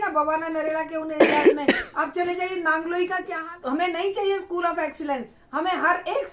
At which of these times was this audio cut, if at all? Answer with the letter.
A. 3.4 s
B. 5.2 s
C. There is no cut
A